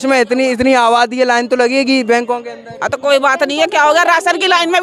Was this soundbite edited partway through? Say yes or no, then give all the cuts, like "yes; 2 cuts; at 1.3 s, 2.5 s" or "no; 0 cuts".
no; 0 cuts